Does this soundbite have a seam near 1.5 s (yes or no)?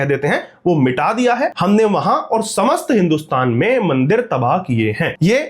yes